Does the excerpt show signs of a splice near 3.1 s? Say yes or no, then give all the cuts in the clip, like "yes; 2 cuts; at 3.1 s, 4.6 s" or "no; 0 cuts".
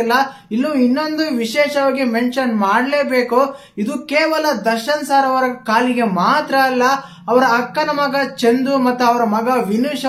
no; 0 cuts